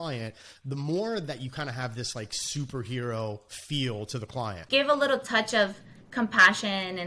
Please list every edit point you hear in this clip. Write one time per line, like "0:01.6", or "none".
0:04.6